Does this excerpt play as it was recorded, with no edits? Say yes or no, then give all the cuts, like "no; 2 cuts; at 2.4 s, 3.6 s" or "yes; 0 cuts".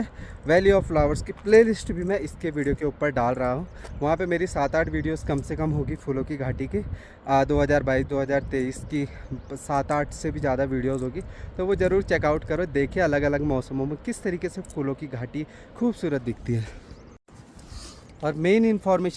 yes; 0 cuts